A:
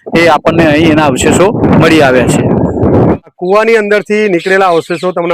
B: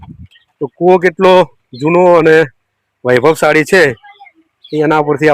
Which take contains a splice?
A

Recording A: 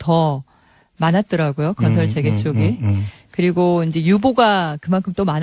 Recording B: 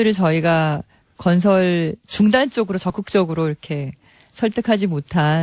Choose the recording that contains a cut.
A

